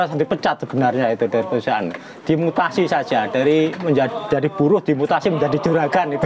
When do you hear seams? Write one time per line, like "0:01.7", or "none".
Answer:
none